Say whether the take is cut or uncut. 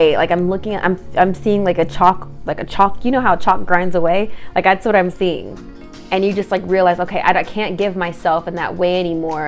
uncut